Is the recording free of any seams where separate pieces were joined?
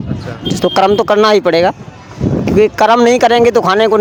yes; 0 cuts

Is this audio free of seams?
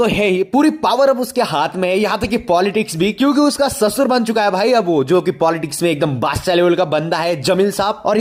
yes; 0 cuts

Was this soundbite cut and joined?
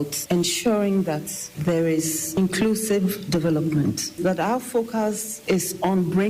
yes; 2 cuts; at 4.1 s, 5.3 s

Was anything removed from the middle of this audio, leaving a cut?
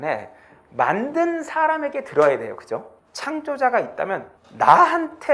yes; 1 cut; at 2.9 s

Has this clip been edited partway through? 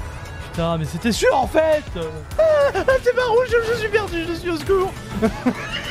yes; 1 cut; at 2.3 s

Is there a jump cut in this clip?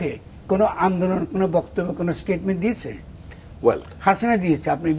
no; 0 cuts

